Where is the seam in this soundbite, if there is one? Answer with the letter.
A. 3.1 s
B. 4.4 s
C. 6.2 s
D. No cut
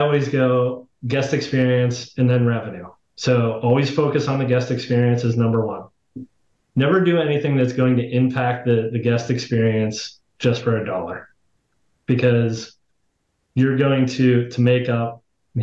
C